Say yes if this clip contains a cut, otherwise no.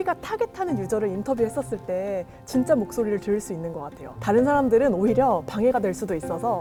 no